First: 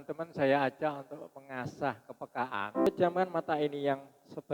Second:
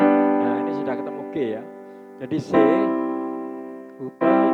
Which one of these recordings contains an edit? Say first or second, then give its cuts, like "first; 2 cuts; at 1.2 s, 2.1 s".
first; 1 cut; at 2.9 s